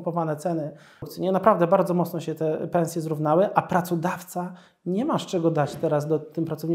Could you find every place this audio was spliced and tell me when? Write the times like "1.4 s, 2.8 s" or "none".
1.1 s